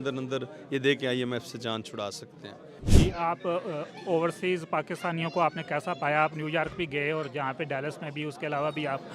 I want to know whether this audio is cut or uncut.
cut